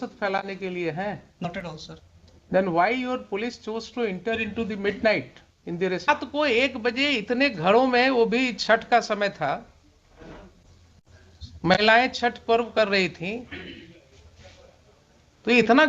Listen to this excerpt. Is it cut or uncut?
cut